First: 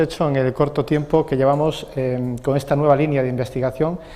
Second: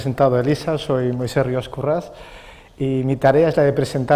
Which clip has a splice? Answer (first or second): first